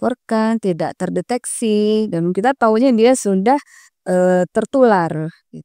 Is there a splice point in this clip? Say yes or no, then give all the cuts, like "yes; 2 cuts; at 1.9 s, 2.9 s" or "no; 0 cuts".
no; 0 cuts